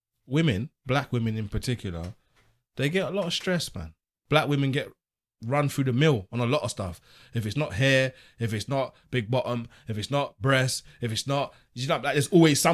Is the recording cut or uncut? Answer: cut